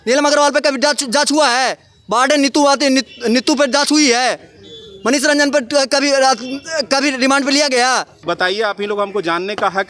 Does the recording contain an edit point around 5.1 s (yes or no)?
no